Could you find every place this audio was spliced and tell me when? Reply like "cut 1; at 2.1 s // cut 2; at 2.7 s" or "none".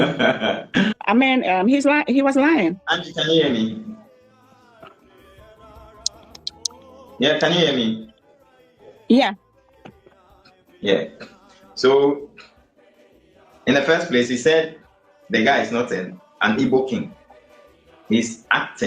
none